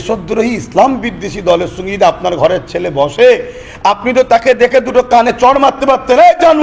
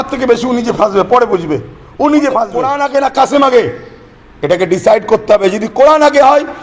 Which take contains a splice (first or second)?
second